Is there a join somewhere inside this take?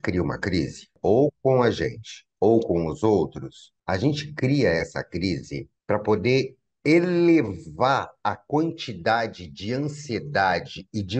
yes; 1 cut; at 0.9 s

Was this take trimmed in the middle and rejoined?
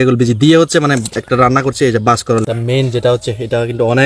yes; 1 cut; at 2.4 s

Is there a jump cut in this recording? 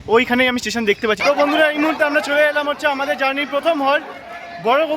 yes; 1 cut; at 1.2 s

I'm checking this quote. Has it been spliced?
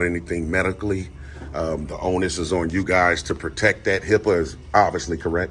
no; 0 cuts

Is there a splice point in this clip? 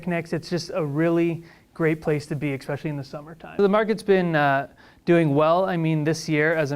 yes; 1 cut; at 3.5 s

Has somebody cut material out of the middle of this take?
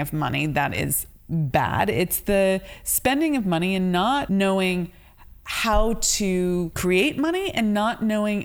yes; 2 cuts; at 4.2 s, 6.7 s

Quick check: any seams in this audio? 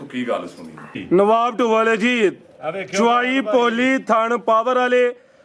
yes; 1 cut; at 1.0 s

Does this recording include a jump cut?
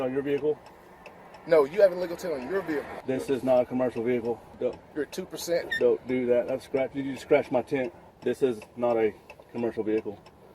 yes; 3 cuts; at 2.9 s, 4.5 s, 8.0 s

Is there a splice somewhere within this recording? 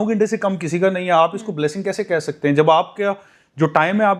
no; 0 cuts

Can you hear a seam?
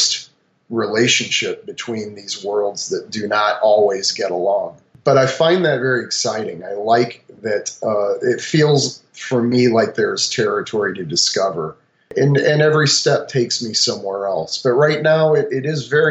no; 0 cuts

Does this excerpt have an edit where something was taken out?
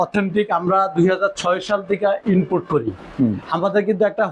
no; 0 cuts

